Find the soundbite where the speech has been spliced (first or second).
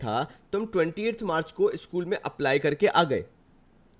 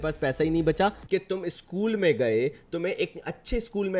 second